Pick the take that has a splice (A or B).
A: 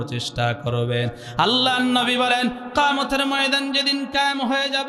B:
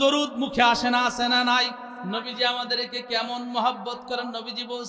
B